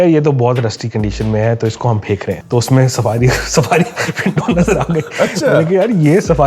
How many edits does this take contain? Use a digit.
1